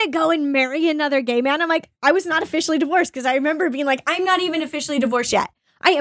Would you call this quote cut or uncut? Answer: cut